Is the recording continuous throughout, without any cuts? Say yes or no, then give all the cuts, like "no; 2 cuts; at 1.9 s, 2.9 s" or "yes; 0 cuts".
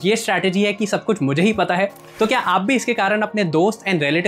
yes; 0 cuts